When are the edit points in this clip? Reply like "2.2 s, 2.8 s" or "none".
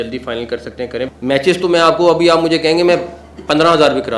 1.1 s